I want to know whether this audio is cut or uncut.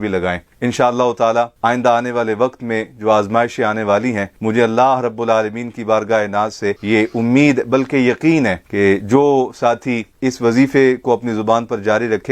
uncut